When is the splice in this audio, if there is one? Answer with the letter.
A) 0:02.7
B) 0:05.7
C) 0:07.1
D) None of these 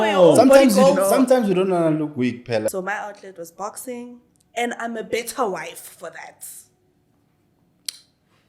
A